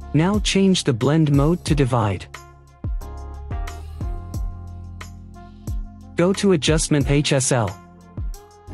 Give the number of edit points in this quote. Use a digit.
0